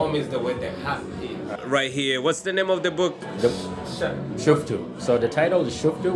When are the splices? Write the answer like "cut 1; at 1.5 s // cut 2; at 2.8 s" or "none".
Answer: cut 1; at 1.4 s